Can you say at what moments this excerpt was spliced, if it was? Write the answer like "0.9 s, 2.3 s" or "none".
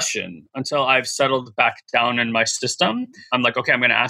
3.2 s

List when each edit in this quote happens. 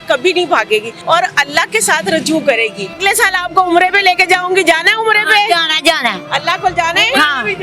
0.9 s, 2.9 s

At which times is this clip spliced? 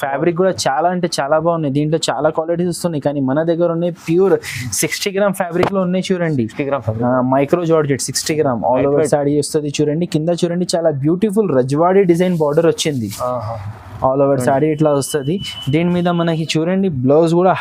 none

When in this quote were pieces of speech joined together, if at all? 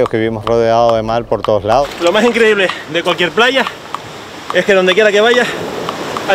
1.8 s

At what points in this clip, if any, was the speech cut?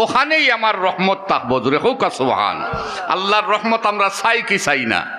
none

